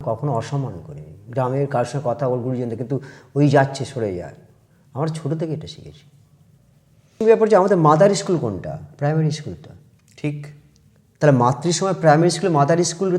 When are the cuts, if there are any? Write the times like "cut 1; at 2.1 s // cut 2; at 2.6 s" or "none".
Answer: cut 1; at 7.2 s